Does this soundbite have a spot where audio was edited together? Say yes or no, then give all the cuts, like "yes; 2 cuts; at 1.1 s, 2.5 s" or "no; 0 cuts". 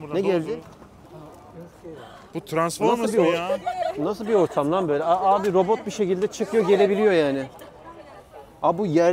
no; 0 cuts